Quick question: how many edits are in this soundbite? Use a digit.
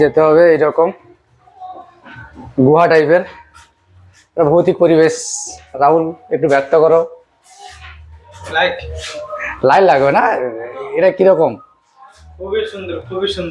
0